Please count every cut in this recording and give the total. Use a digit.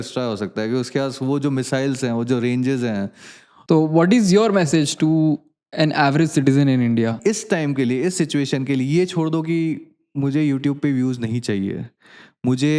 2